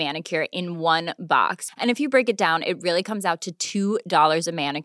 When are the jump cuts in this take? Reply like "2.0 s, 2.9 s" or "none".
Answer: none